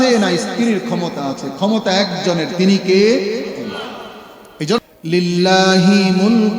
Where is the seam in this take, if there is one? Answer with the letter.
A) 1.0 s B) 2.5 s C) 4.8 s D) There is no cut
C